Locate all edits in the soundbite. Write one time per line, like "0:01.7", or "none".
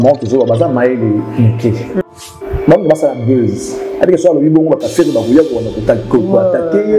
0:02.0